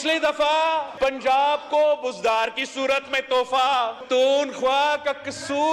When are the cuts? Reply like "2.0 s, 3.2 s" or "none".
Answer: 0.9 s, 4.0 s